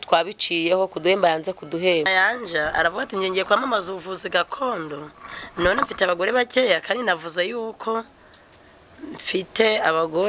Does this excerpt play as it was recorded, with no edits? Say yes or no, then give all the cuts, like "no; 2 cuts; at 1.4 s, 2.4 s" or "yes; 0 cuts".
no; 1 cut; at 2.1 s